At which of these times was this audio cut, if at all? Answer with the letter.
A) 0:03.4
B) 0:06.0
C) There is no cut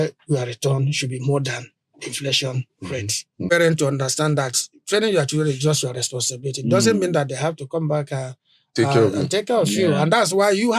A